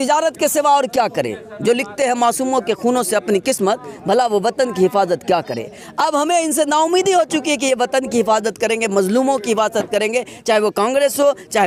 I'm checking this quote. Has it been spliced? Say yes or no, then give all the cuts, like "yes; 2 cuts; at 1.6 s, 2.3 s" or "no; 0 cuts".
no; 0 cuts